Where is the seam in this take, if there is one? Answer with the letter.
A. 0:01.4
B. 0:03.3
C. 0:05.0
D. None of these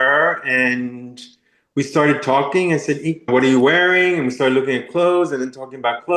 B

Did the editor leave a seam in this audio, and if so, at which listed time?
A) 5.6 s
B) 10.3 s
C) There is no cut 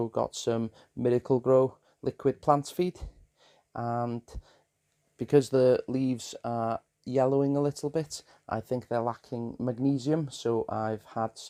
C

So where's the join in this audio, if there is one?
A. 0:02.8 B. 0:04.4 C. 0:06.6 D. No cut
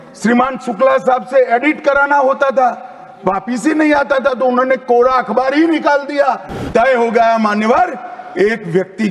C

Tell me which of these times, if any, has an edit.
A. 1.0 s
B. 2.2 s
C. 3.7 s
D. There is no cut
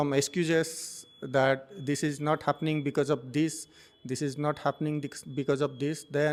D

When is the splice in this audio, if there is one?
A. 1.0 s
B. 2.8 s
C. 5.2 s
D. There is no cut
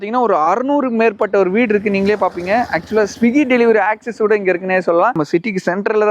C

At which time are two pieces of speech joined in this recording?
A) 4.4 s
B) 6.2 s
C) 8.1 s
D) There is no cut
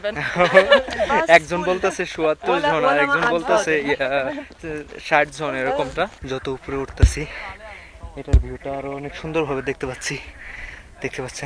B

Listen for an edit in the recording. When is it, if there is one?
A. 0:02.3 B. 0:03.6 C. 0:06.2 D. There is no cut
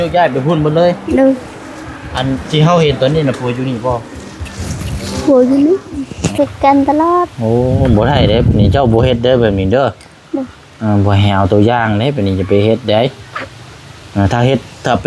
C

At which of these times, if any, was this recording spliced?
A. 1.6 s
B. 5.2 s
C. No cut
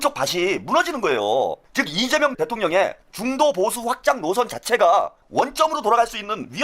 A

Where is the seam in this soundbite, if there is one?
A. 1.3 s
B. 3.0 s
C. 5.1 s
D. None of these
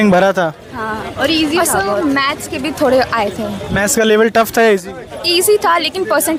D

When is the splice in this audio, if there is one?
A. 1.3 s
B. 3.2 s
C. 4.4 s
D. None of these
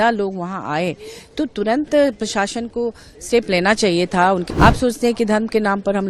C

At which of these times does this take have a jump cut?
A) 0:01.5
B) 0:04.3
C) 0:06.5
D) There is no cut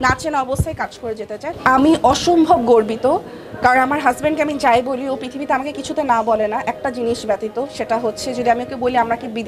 A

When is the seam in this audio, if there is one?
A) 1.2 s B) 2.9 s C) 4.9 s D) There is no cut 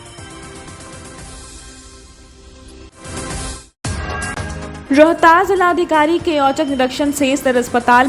B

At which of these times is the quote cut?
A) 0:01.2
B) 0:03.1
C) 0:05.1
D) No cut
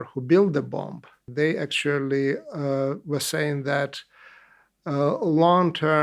A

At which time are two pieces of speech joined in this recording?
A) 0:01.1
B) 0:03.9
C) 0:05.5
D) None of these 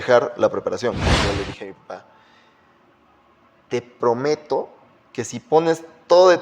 A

